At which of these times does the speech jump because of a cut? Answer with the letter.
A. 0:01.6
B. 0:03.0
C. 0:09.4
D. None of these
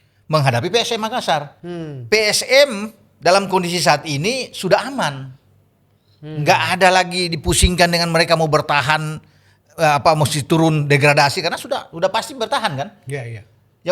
D